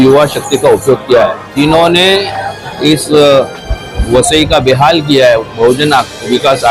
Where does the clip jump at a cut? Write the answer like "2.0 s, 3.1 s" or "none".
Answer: 1.5 s